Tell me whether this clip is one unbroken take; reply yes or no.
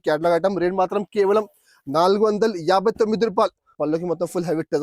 no